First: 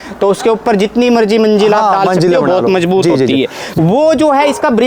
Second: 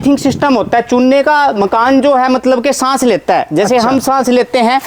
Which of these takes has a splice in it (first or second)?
first